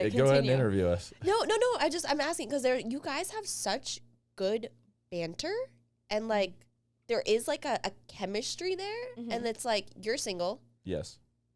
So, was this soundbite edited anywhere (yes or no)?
no